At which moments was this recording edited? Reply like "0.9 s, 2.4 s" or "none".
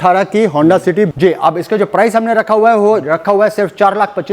1.1 s